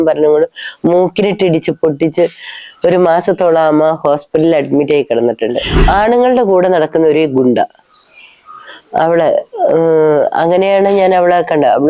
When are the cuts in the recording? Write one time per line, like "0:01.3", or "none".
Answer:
0:05.7